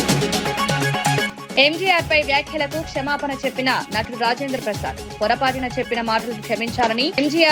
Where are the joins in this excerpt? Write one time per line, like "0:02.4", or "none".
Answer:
none